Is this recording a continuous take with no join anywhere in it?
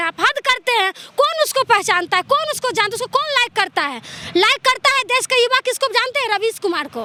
yes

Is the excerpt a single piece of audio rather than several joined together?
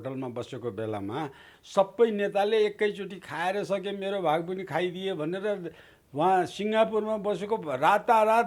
no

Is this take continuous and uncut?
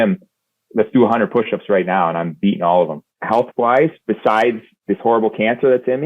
no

